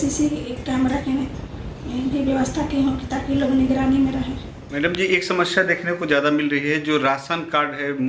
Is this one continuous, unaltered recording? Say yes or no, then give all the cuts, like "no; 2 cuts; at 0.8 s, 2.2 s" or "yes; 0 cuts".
yes; 0 cuts